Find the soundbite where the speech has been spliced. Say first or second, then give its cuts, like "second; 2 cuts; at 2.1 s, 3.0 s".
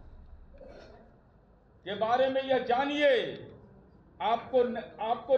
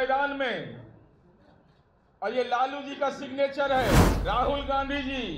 second; 1 cut; at 4.1 s